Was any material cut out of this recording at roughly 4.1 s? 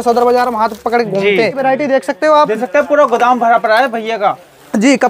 no; 1 cut; at 1.6 s

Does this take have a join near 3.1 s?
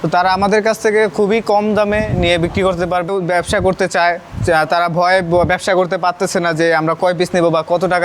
yes; 1 cut; at 3.1 s

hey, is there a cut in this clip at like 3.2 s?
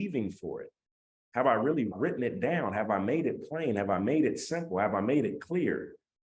no; 1 cut; at 1.9 s

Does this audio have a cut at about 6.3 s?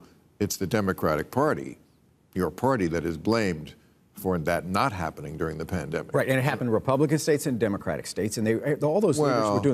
yes; 1 cut; at 6.3 s

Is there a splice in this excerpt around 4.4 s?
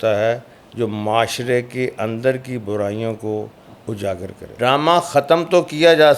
yes; 1 cut; at 4.4 s

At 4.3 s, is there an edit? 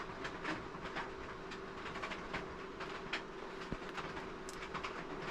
no; 0 cuts

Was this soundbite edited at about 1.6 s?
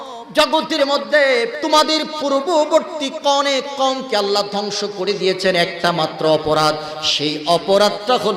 yes; 1 cut; at 1.6 s

